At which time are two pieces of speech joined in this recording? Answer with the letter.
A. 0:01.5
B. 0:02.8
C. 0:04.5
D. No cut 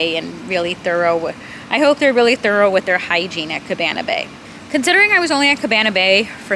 D